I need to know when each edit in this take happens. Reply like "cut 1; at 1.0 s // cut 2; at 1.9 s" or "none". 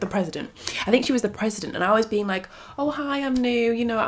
none